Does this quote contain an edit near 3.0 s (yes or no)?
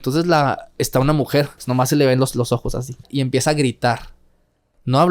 yes